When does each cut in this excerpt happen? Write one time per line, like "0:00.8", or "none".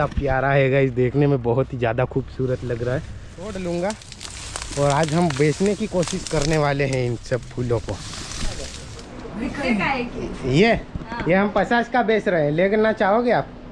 0:03.5
0:09.2